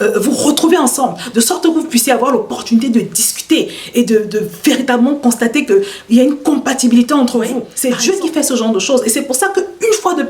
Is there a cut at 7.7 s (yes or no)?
yes